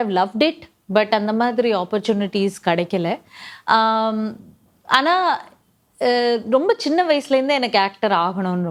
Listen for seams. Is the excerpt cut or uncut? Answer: uncut